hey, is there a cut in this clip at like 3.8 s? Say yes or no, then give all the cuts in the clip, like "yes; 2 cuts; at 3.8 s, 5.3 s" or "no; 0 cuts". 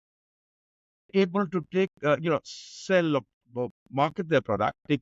no; 0 cuts